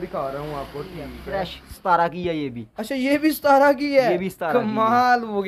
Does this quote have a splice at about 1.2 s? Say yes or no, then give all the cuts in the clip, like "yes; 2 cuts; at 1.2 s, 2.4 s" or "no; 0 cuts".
yes; 1 cut; at 1.2 s